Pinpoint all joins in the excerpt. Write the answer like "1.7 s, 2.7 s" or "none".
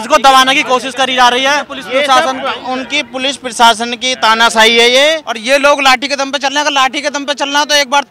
1.8 s, 5.3 s